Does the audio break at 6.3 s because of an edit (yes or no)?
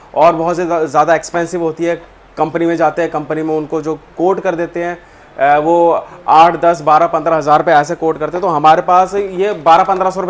no